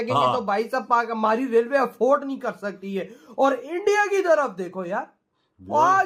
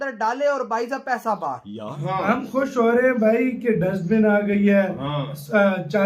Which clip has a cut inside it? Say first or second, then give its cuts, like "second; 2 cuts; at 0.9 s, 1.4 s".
second; 1 cut; at 1.9 s